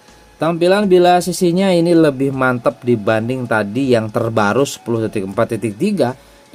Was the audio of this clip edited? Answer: no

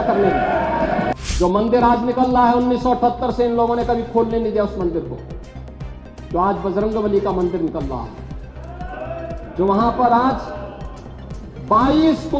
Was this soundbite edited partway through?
yes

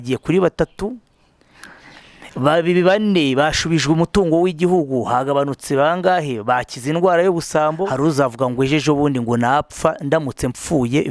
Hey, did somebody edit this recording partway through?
yes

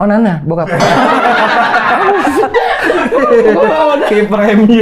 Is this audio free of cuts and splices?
yes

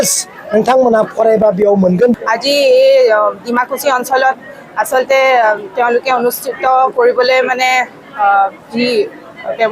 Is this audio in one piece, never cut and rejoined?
no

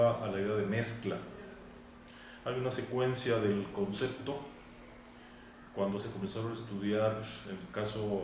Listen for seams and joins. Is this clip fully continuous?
yes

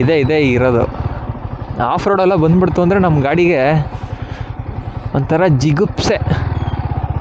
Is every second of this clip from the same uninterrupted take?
yes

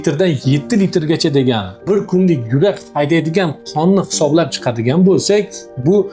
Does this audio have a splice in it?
yes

